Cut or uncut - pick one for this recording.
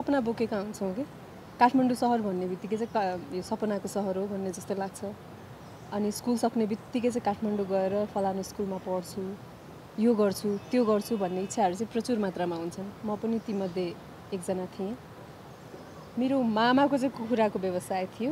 uncut